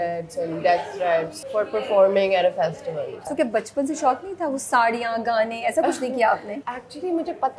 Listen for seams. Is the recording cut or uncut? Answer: cut